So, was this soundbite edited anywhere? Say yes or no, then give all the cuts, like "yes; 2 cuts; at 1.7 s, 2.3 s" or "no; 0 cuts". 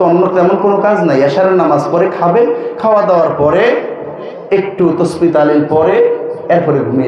no; 0 cuts